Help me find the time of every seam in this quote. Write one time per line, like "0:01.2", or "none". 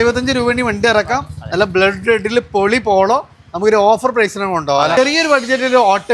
0:05.0